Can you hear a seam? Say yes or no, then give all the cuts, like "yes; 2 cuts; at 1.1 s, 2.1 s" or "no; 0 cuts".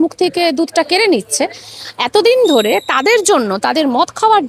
no; 0 cuts